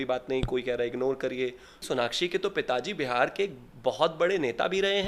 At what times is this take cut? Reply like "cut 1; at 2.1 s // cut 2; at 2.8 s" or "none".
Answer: cut 1; at 1.8 s